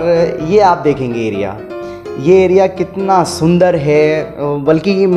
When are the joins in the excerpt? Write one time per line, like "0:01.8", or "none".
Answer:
none

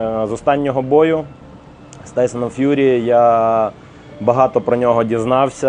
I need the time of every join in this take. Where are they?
none

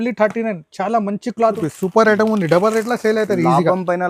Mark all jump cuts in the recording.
0:01.6

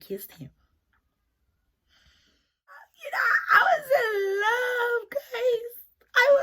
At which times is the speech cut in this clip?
0:02.9

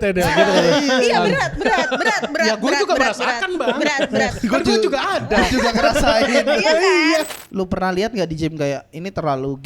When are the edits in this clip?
0:07.3

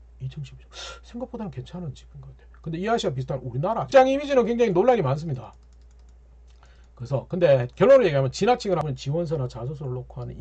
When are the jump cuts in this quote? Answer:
0:03.9
0:08.8

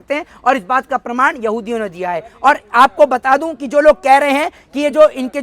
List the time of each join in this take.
none

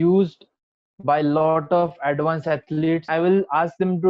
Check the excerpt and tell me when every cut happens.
0:03.1

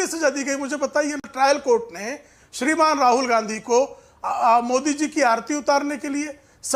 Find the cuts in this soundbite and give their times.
none

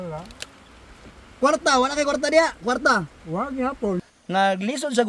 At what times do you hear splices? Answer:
0:04.1

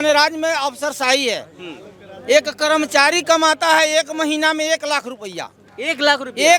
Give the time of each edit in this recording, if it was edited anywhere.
none

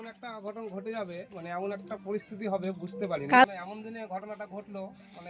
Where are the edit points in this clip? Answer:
0:03.4

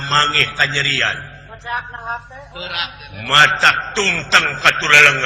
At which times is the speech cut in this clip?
none

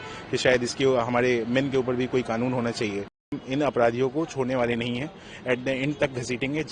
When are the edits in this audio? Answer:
0:03.4

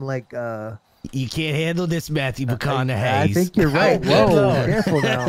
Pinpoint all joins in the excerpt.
none

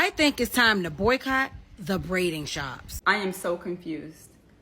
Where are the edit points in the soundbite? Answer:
0:02.8

